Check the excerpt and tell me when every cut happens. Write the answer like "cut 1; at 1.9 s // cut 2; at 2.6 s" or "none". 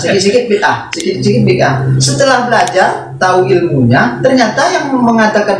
none